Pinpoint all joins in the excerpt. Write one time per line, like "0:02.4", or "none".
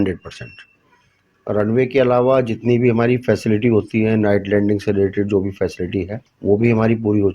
0:06.2